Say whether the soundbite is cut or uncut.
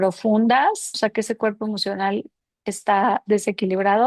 cut